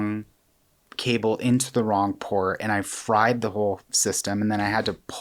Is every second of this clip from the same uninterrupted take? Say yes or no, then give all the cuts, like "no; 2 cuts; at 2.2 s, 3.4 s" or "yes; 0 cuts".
yes; 0 cuts